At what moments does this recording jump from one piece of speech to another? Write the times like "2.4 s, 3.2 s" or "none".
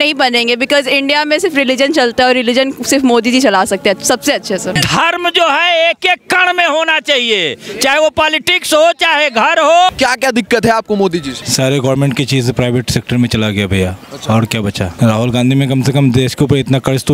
4.8 s, 9.9 s, 11.4 s, 14.9 s